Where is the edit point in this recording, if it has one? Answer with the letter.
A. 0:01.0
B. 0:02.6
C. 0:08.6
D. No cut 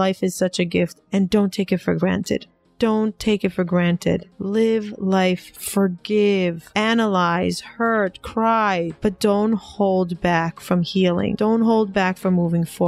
A